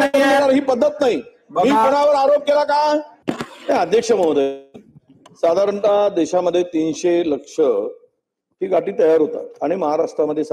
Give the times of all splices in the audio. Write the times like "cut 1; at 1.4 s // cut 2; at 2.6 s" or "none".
none